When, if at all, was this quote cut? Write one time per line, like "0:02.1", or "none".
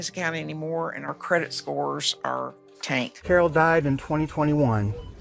0:03.2

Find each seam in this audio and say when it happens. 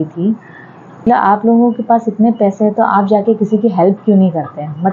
0:01.0

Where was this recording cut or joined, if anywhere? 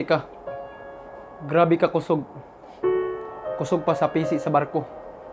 none

